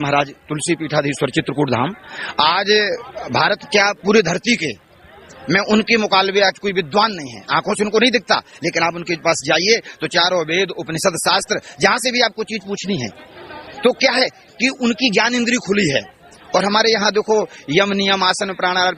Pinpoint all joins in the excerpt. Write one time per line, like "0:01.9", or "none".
none